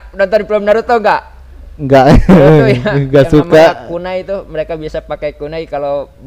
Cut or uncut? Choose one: uncut